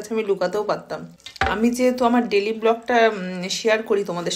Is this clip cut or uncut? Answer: cut